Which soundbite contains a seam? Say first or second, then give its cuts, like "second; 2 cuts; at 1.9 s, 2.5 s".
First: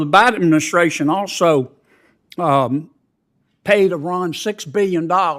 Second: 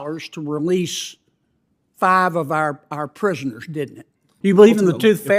second; 1 cut; at 4.3 s